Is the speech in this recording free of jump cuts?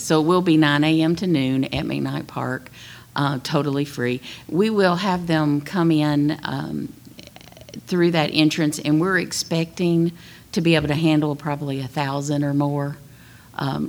yes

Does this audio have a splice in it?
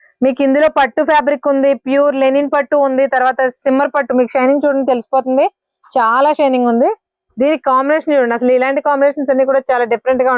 no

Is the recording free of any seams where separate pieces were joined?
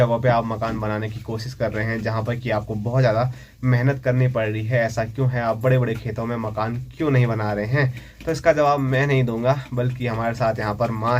yes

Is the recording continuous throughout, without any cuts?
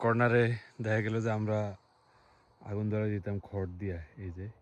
yes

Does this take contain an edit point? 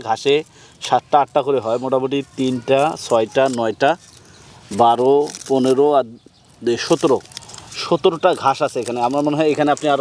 no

